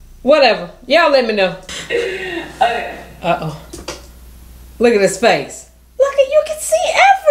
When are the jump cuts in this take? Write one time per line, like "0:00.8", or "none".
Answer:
0:01.7